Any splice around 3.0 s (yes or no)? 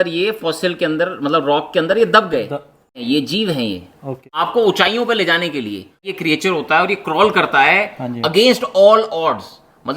yes